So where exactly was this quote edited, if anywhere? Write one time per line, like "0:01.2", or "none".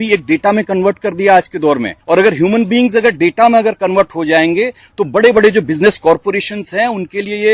0:01.9